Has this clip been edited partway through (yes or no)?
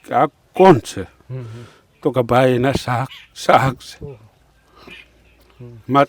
no